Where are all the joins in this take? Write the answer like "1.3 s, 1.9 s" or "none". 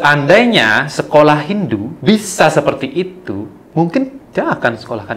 1.9 s, 3.6 s, 4.2 s